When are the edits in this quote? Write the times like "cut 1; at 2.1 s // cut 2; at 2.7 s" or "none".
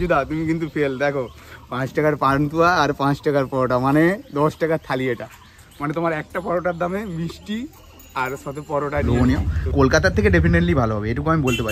cut 1; at 9.1 s